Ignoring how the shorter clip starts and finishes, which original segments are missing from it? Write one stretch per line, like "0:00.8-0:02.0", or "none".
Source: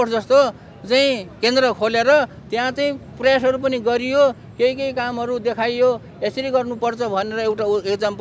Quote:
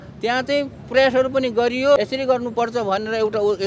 0:04.3-0:06.2